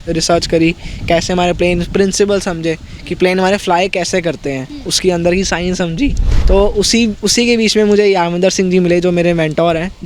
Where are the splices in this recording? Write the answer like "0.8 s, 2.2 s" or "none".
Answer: 6.3 s